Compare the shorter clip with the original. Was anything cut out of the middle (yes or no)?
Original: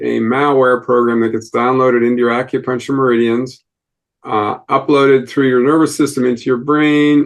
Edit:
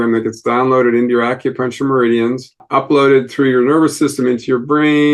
yes